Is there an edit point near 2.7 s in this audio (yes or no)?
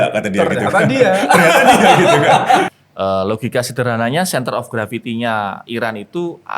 yes